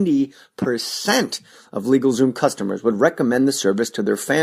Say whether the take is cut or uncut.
cut